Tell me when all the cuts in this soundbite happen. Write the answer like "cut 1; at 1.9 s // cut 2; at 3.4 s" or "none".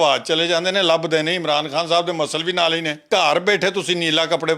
cut 1; at 3.0 s